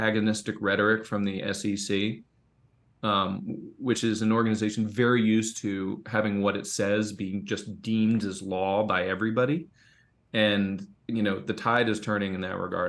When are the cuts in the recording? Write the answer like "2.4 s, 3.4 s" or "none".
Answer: none